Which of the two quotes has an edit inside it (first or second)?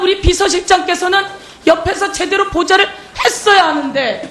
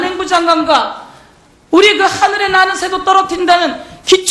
second